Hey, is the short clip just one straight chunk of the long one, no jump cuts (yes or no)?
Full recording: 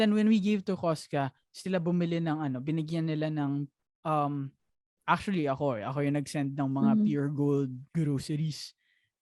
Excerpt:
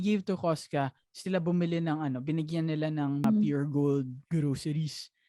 no